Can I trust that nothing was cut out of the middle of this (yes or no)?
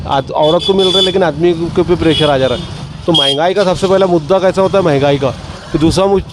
yes